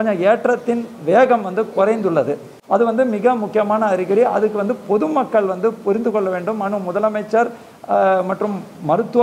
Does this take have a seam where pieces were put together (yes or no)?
no